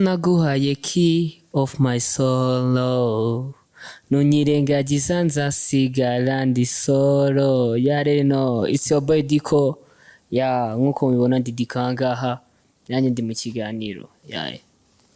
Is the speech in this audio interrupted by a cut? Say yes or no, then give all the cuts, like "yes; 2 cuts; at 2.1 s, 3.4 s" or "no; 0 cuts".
no; 0 cuts